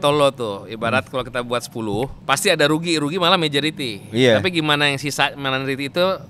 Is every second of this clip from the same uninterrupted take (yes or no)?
no